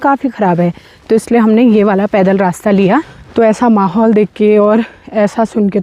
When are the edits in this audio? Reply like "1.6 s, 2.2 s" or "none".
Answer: 3.2 s